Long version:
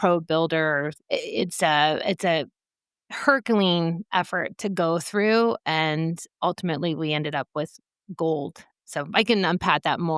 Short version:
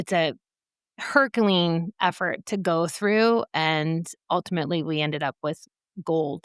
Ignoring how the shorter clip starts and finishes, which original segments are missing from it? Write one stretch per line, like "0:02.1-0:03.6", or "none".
none